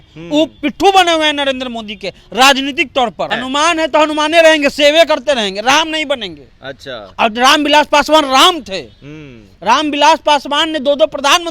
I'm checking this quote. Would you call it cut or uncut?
cut